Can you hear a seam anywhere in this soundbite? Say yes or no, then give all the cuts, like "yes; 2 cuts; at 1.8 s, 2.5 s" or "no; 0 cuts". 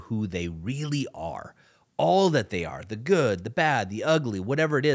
no; 0 cuts